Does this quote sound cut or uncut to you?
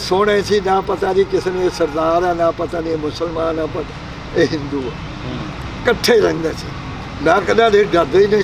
uncut